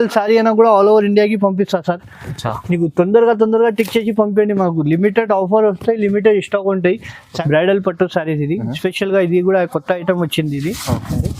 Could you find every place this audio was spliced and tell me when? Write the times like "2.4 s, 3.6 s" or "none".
7.4 s